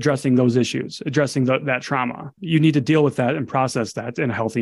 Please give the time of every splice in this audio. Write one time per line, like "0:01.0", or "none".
0:02.4